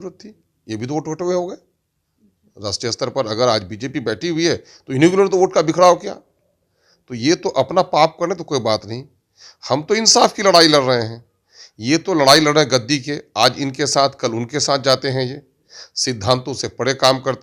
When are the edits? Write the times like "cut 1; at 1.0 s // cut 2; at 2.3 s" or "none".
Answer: none